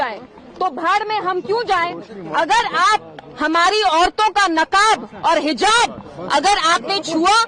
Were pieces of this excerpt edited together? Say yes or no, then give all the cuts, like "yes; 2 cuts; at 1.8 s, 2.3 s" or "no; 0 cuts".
no; 0 cuts